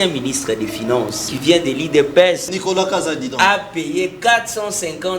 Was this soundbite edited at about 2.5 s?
yes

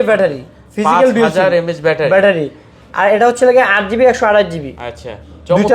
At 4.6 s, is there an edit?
no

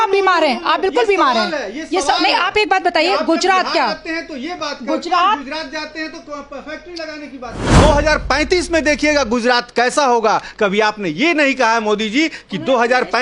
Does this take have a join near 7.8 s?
yes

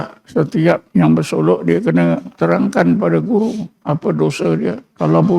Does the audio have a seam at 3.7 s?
no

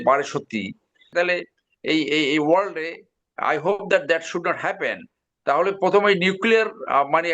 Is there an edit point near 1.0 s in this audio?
yes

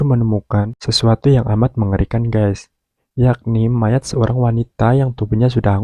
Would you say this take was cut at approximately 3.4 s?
no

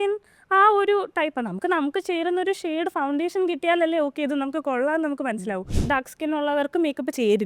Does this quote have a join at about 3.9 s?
no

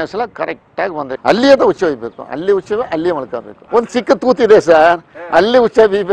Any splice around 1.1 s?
yes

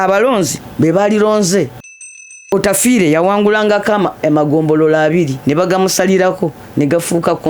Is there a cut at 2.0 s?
yes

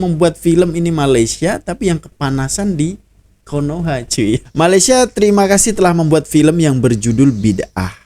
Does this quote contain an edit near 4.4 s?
yes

